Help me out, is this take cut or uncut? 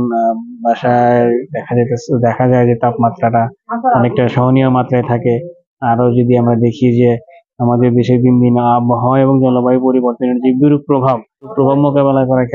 cut